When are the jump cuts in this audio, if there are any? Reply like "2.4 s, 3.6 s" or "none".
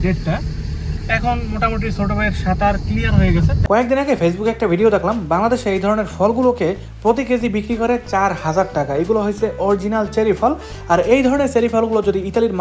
3.6 s